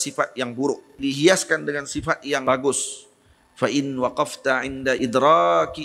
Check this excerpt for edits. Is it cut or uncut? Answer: cut